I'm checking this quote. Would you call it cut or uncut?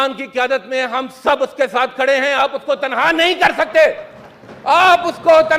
uncut